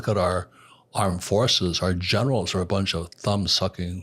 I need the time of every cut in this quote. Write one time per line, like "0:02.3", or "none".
none